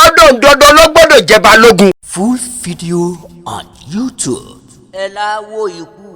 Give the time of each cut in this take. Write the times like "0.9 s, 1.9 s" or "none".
2.1 s